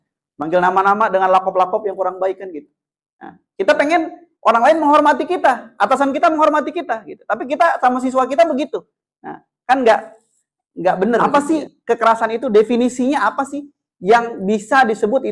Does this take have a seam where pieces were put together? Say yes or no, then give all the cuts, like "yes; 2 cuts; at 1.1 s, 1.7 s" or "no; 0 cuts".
yes; 1 cut; at 11.2 s